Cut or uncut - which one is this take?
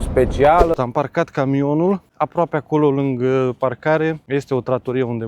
cut